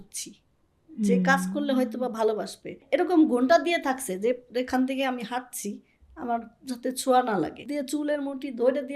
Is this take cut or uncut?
cut